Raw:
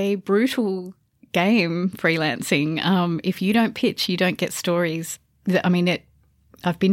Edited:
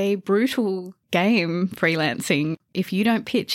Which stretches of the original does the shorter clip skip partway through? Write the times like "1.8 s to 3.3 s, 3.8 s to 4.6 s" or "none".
0.9 s to 1.1 s, 2.8 s to 3.1 s